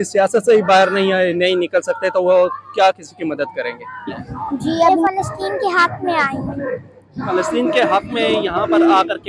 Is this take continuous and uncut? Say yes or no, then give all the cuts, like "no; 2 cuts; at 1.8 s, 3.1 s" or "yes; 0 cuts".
no; 1 cut; at 4.9 s